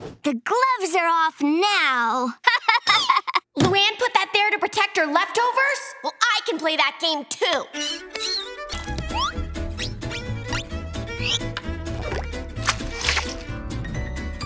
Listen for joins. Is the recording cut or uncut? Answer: cut